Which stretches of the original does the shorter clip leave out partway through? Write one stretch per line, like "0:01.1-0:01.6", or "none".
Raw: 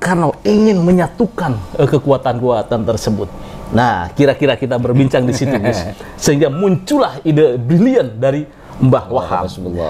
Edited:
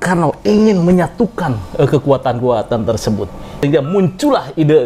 0:03.6-0:06.3